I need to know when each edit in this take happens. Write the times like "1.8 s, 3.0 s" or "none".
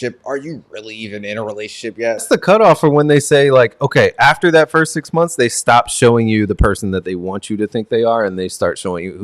2.2 s